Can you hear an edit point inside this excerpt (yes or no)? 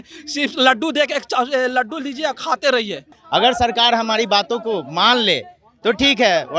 yes